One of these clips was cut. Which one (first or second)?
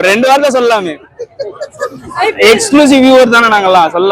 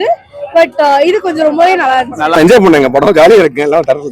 second